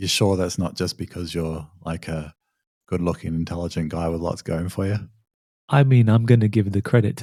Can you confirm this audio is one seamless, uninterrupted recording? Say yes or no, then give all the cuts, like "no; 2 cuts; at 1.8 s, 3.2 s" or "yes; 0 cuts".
yes; 0 cuts